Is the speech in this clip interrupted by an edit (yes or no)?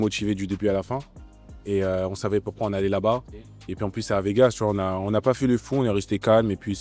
no